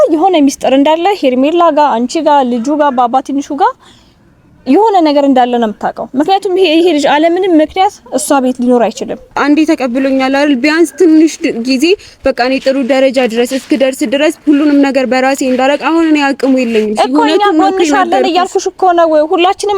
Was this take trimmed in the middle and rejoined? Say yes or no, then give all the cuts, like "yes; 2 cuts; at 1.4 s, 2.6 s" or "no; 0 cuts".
yes; 1 cut; at 9.3 s